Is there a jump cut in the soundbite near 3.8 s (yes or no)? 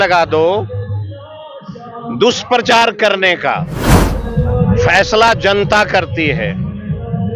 yes